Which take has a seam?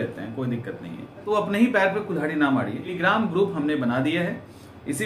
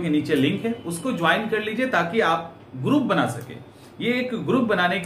first; 2 cuts; at 1.2 s, 2.9 s

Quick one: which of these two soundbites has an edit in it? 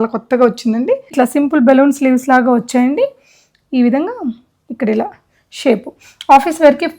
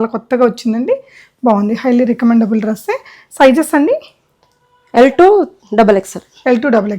first; 1 cut; at 1.1 s

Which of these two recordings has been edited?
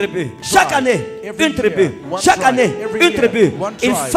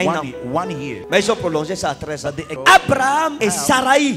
second; 1 cut; at 2.5 s

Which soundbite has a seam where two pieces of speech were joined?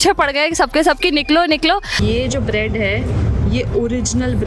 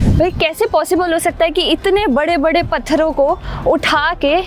first; 1 cut; at 2.0 s

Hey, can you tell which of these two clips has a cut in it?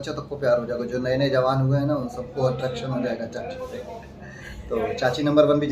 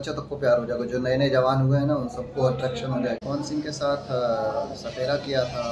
second; 1 cut; at 3.2 s

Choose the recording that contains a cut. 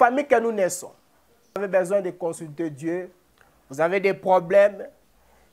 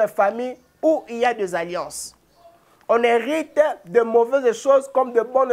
first; 1 cut; at 1.6 s

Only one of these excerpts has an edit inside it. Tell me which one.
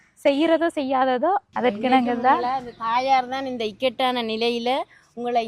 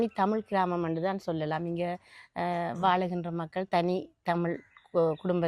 first; 1 cut; at 1.5 s

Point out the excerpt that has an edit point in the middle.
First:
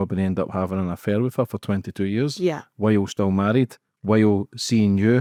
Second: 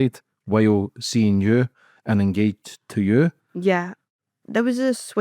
second; 1 cut; at 4.2 s

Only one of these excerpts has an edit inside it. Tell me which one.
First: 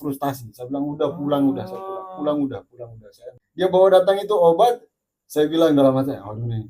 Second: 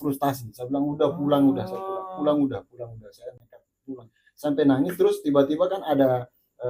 first; 1 cut; at 3.4 s

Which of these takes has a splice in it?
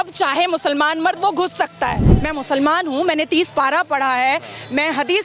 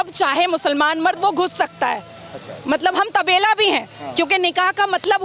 first; 1 cut; at 2.1 s

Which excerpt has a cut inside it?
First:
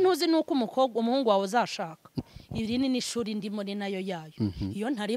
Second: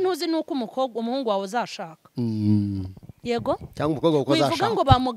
first; 1 cut; at 2.1 s

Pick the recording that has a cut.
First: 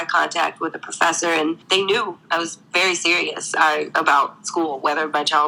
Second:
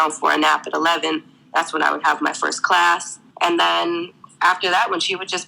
second; 1 cut; at 3.2 s

